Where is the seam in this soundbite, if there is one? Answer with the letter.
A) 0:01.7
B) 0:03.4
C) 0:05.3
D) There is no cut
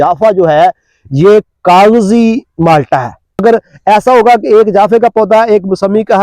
B